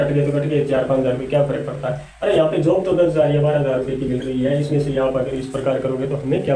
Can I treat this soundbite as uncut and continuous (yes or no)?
yes